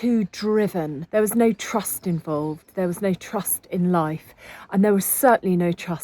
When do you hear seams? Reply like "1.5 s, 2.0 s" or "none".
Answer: 1.0 s